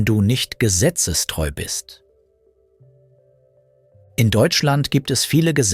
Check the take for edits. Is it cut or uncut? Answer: cut